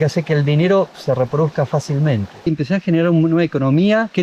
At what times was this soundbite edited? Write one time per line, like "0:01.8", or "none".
0:02.5